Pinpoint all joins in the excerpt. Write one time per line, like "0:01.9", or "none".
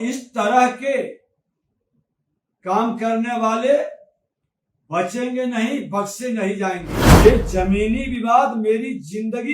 0:07.0